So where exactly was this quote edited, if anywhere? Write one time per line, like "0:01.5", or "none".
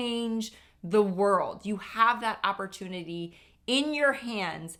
none